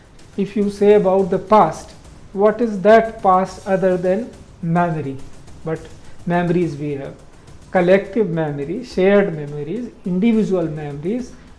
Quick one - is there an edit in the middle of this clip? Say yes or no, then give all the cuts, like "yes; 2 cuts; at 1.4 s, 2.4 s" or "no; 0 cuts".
no; 0 cuts